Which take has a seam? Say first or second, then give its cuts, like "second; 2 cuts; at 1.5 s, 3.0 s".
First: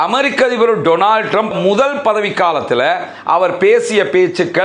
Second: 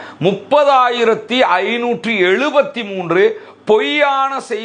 first; 1 cut; at 1.6 s